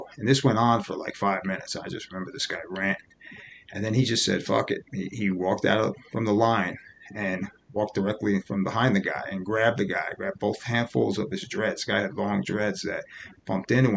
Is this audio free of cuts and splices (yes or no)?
yes